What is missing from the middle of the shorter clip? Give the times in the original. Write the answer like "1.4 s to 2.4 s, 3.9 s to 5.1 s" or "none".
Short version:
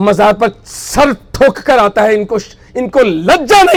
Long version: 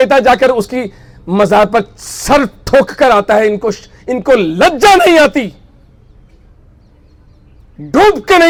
none